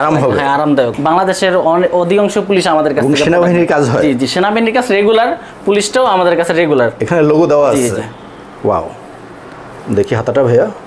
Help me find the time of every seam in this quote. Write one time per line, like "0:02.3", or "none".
0:00.9